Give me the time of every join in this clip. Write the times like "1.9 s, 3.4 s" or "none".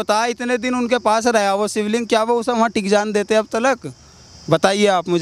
none